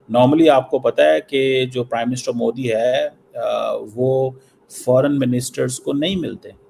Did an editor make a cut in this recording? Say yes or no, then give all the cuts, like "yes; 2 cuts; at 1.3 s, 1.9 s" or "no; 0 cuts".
no; 0 cuts